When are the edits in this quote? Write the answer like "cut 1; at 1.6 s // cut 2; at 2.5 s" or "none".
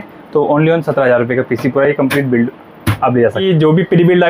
cut 1; at 3.4 s